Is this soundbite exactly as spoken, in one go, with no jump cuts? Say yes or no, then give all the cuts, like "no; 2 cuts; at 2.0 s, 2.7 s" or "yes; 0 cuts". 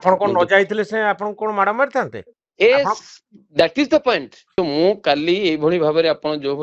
no; 1 cut; at 4.5 s